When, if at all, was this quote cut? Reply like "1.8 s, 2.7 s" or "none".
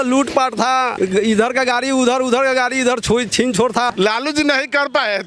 0.9 s, 3.9 s